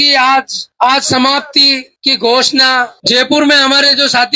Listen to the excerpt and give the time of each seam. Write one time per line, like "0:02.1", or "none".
none

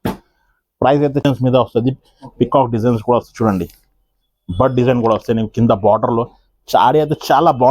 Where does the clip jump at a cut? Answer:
0:01.2

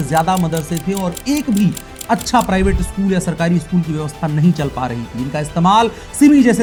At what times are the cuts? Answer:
none

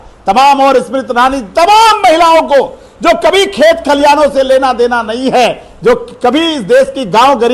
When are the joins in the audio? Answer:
none

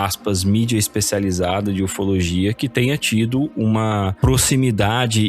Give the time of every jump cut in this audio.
0:04.1

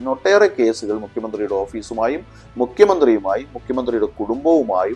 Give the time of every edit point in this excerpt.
none

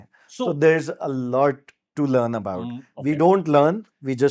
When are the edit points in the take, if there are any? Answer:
none

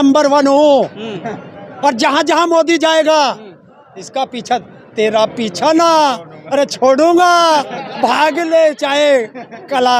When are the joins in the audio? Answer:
none

